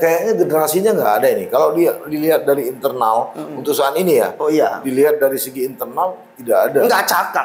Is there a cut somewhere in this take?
no; 0 cuts

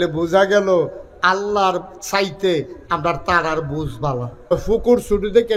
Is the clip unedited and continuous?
no; 1 cut; at 4.5 s

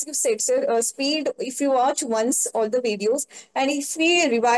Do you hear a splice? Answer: no; 0 cuts

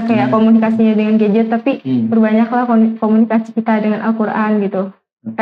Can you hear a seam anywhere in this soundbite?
no; 0 cuts

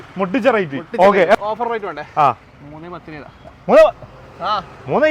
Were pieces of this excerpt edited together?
yes; 1 cut; at 1.4 s

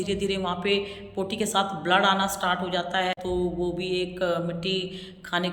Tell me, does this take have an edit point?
yes; 1 cut; at 3.2 s

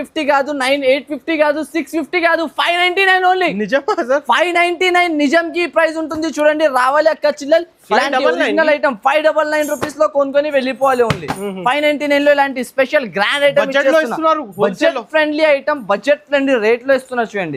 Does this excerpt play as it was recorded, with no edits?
yes; 0 cuts

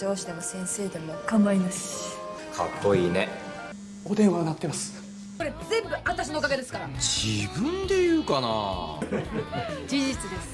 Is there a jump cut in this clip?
yes; 1 cut; at 2.2 s

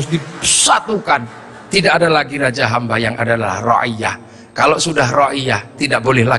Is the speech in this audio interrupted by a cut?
no; 0 cuts

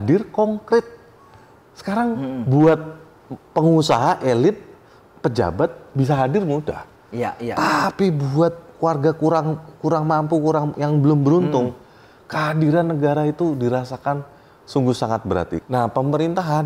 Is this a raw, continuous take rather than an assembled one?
no; 1 cut; at 15.6 s

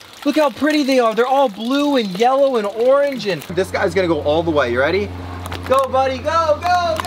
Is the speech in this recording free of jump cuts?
no; 1 cut; at 3.5 s

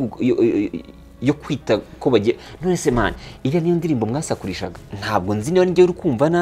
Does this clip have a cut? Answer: yes; 1 cut; at 4.7 s

